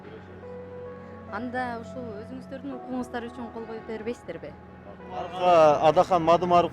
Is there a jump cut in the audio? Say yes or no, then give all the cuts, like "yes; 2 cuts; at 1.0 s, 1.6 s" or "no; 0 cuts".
yes; 1 cut; at 5.3 s